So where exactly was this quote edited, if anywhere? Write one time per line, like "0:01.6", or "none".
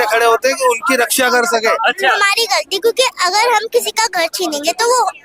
0:02.2